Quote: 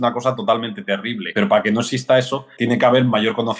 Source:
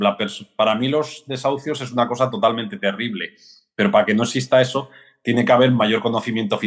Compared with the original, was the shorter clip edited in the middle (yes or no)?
yes